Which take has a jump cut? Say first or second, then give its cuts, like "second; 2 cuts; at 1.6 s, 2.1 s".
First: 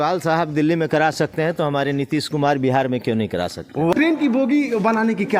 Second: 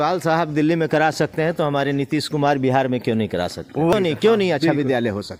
first; 1 cut; at 3.9 s